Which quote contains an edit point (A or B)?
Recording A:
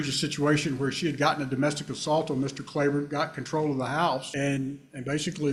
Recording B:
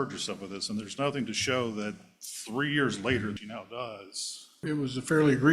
B